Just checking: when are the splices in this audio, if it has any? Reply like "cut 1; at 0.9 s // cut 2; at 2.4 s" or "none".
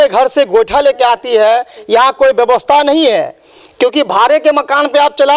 none